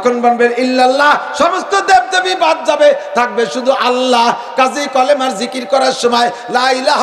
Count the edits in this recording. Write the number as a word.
zero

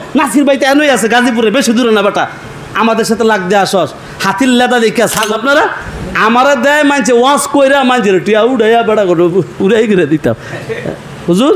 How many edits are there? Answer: one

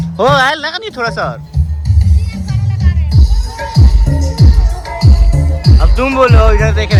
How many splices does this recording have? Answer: zero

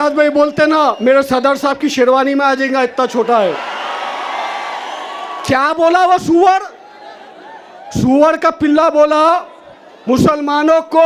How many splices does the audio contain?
zero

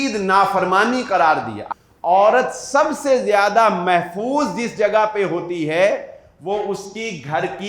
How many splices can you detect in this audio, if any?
one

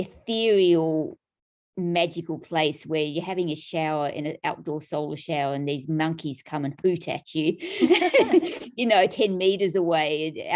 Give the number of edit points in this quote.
zero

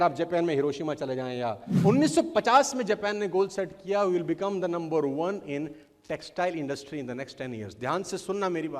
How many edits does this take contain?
one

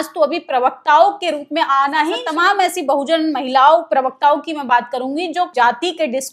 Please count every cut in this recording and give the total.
two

